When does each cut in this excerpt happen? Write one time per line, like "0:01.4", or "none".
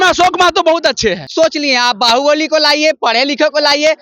0:01.2